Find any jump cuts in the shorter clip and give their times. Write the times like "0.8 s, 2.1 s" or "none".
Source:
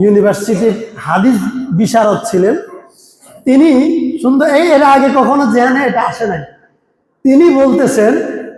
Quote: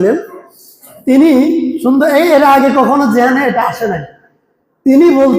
none